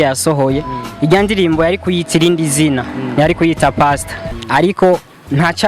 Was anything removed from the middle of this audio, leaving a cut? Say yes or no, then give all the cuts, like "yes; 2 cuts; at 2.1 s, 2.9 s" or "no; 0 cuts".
yes; 1 cut; at 4.3 s